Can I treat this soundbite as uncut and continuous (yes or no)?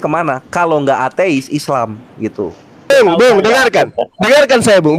no